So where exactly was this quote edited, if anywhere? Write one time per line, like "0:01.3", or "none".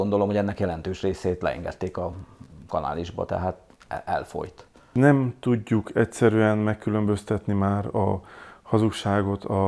0:04.8